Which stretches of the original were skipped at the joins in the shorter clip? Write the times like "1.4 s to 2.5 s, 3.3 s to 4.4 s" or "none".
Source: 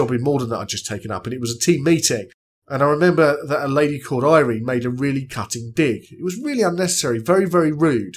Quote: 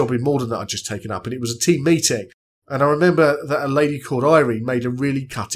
none